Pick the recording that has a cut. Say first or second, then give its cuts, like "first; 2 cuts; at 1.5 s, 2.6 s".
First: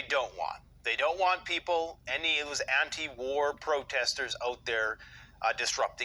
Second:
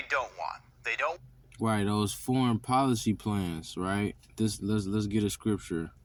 first; 1 cut; at 1.2 s